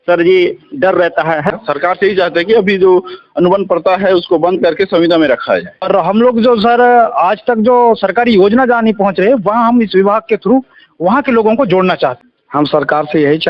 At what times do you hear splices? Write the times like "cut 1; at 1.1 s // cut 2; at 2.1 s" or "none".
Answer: cut 1; at 1.5 s // cut 2; at 5.9 s // cut 3; at 12.2 s